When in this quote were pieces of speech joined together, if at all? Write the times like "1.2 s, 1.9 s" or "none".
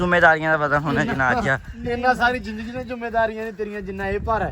none

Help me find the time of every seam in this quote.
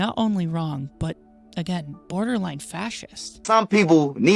3.3 s

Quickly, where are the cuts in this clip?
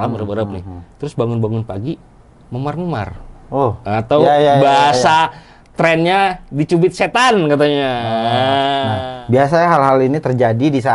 9.0 s

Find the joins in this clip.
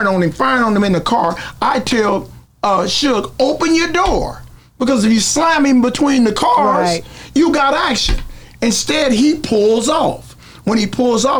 none

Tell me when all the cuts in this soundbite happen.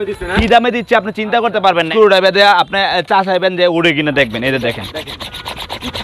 1.9 s

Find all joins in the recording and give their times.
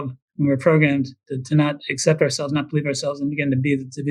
none

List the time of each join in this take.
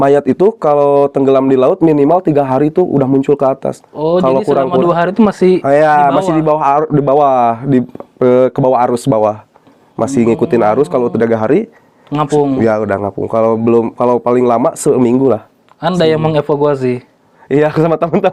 none

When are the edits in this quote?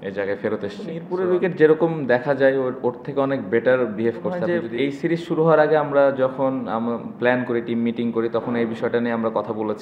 1.0 s, 4.4 s

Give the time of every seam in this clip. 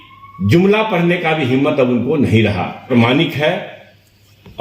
2.8 s

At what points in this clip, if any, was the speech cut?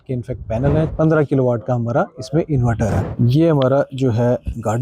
0.9 s, 3.2 s

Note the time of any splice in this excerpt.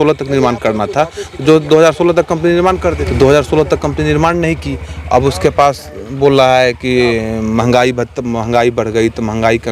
3.0 s

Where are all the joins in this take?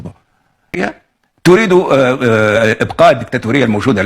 0.9 s

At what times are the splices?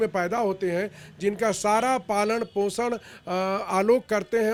none

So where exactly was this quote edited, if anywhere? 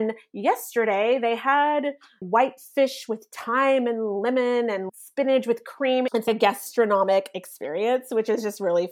4.9 s, 6.2 s

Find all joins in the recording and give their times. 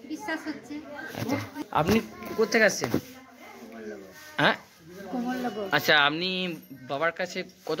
1.6 s

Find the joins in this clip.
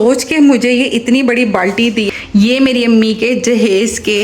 2.1 s

